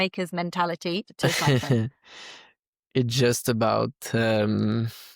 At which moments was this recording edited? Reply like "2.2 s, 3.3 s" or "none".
1.1 s